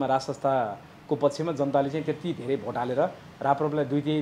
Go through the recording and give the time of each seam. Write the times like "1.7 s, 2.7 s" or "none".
none

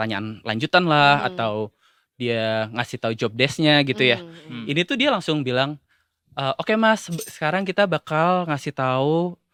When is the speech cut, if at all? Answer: none

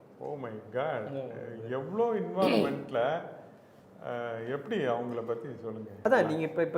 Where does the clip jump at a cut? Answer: 5.9 s

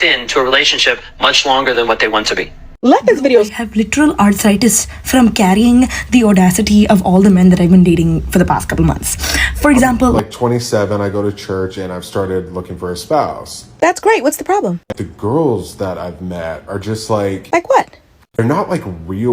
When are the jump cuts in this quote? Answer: 3.5 s, 10.2 s

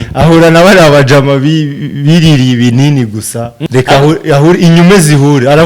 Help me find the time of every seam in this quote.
3.6 s

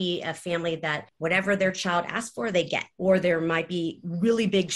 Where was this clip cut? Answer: 1.0 s, 2.9 s

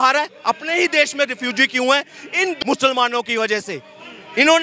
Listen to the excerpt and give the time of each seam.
none

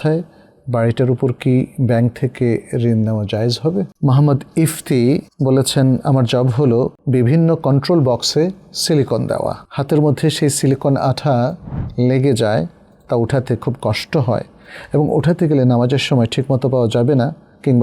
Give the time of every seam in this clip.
3.9 s, 5.3 s, 7.0 s, 9.6 s

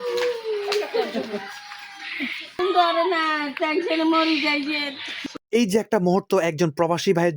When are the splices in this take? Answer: 2.6 s, 5.1 s

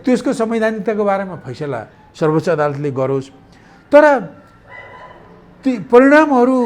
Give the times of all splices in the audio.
none

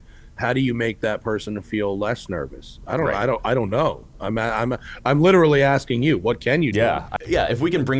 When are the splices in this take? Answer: 7.1 s

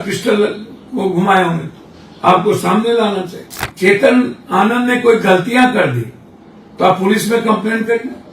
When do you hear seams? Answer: 3.7 s

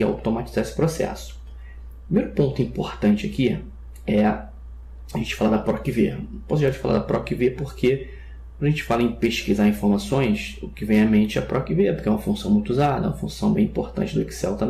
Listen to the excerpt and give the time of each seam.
7.6 s

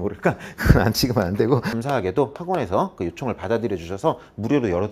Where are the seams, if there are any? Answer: 1.7 s

